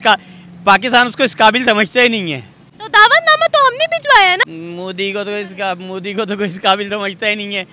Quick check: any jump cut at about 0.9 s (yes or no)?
no